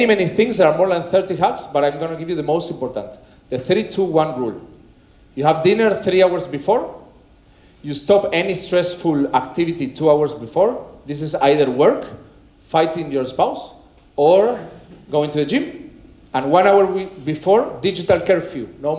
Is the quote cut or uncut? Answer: uncut